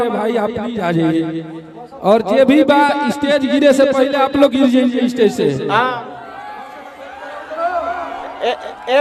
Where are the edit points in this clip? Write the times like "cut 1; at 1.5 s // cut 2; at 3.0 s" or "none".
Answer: none